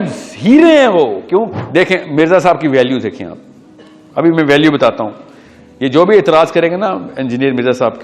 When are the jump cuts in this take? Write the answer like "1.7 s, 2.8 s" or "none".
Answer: 1.6 s

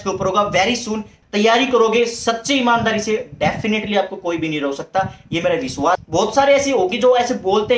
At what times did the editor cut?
1.1 s, 6.0 s

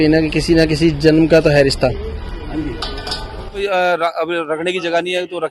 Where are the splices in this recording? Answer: 3.6 s

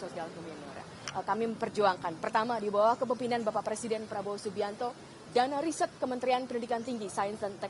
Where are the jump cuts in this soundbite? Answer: 1.0 s

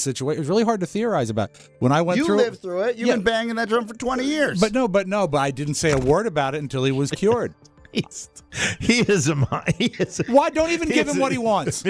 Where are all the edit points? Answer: none

